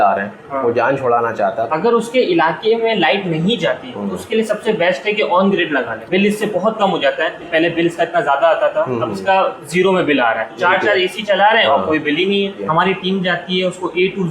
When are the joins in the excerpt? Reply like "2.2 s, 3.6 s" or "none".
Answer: 1.7 s, 6.0 s, 7.4 s, 10.5 s, 12.6 s